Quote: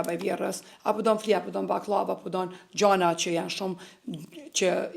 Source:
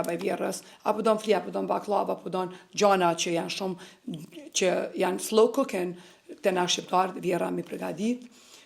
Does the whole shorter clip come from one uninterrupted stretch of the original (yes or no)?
yes